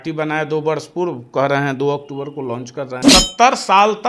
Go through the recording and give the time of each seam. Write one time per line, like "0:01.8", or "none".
0:03.0